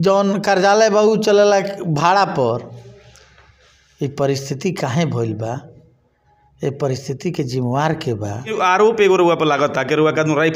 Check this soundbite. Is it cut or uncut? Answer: cut